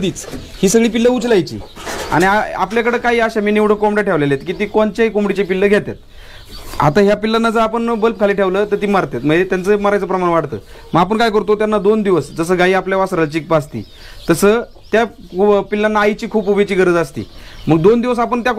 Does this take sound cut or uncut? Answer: uncut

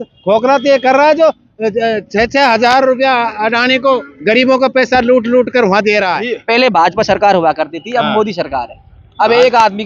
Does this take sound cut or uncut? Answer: cut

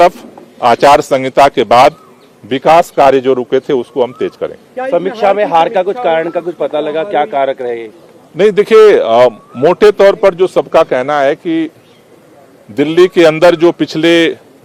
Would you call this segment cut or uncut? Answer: uncut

